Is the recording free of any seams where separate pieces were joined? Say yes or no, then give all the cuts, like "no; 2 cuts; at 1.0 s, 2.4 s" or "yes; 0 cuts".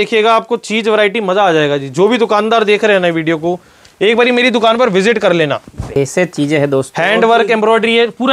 no; 1 cut; at 6.0 s